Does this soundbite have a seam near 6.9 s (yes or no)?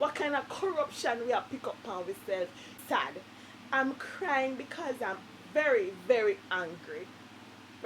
no